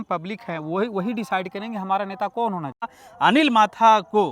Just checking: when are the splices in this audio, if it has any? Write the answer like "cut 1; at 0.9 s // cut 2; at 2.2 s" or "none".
cut 1; at 3.0 s